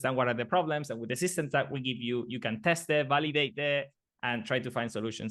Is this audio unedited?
yes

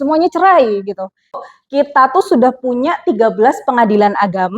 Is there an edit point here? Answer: yes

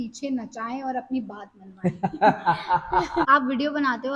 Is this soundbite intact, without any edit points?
no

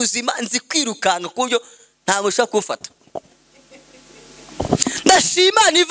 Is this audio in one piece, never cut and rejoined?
yes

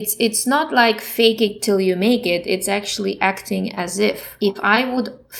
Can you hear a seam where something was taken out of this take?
yes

